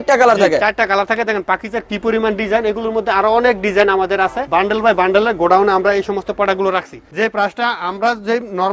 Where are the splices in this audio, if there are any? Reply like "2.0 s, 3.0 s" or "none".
4.4 s, 7.0 s